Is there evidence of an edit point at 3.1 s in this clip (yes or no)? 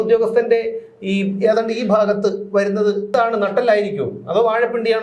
yes